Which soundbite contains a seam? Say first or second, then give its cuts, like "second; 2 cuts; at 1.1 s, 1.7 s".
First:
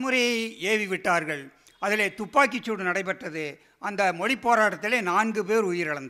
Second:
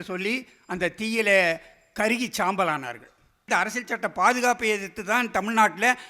second; 1 cut; at 3.5 s